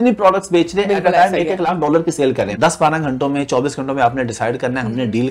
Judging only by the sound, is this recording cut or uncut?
cut